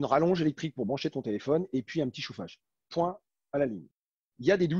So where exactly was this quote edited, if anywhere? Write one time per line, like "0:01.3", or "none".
none